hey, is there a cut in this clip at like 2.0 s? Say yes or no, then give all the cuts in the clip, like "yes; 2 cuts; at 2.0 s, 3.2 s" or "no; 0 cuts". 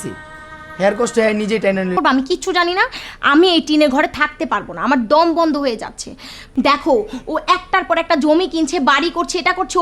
yes; 1 cut; at 2.0 s